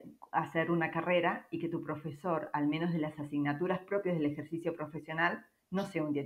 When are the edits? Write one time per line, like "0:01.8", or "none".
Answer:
none